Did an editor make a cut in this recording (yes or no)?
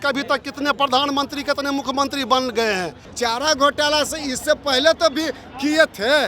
yes